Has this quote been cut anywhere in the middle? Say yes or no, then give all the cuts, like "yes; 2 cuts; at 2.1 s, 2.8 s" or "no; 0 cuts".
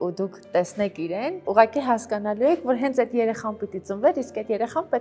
no; 0 cuts